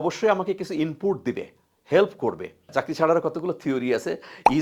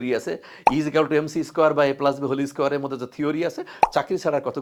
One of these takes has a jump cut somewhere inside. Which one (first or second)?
first